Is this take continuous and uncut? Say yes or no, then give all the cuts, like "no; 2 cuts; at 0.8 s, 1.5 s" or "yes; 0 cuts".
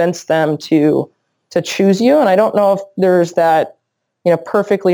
yes; 0 cuts